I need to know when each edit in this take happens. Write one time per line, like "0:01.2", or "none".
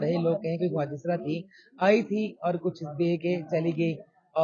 none